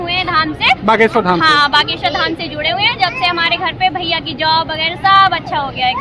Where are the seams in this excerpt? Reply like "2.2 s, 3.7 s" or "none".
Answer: none